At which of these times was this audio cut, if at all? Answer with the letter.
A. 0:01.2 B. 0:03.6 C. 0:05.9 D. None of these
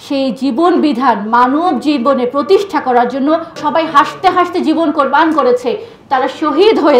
B